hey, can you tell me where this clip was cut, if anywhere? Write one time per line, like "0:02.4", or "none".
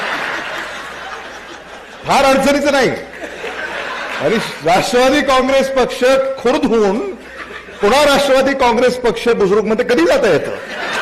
none